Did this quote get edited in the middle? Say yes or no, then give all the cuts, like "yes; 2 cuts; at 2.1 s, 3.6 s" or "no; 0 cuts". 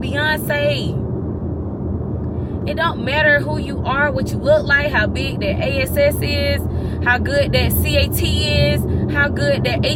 no; 0 cuts